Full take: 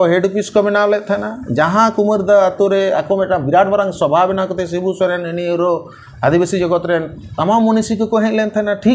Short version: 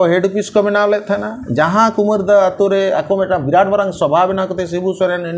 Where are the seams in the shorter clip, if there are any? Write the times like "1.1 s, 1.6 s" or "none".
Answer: none

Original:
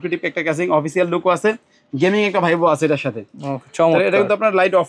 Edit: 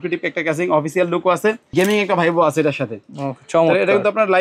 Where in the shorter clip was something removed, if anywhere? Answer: 1.6 s

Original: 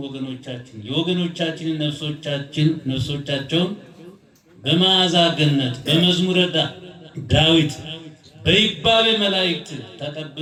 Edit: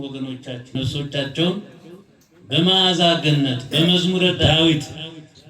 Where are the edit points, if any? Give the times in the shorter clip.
0.8 s, 4.4 s

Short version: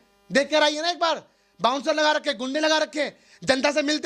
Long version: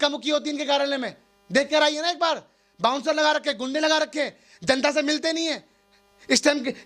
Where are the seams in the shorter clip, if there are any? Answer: none

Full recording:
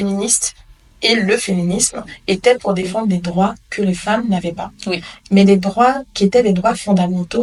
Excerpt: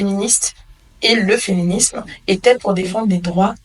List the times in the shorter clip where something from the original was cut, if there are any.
none

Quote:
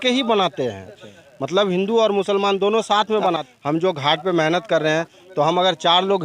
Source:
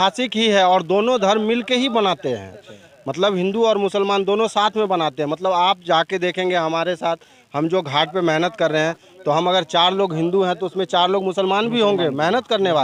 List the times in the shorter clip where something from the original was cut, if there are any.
3.4 s

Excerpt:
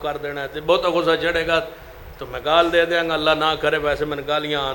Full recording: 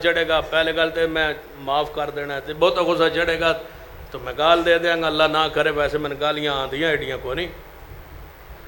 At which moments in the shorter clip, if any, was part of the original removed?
none

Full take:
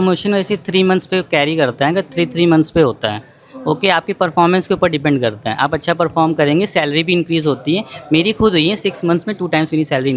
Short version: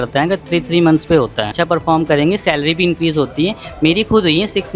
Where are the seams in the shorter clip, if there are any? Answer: 1.5 s

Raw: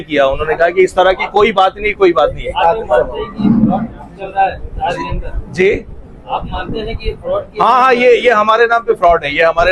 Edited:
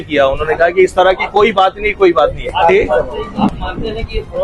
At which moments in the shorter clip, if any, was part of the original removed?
2.5 s

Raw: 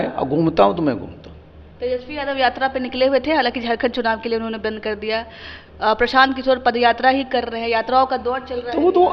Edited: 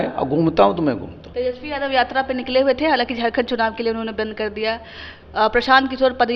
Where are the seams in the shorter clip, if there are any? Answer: 1.2 s

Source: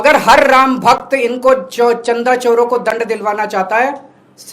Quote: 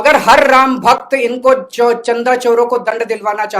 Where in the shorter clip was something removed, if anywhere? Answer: none

